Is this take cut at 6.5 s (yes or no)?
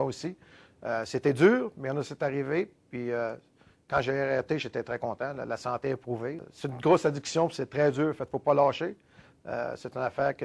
yes